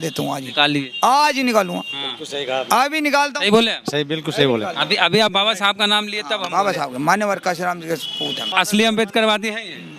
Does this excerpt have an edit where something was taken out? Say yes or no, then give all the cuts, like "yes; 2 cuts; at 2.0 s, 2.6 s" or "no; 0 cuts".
yes; 1 cut; at 8.4 s